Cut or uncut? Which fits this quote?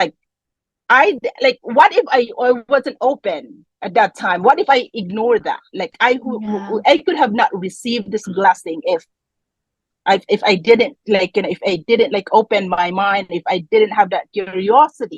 uncut